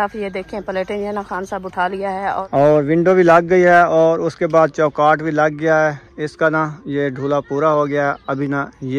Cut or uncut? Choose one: cut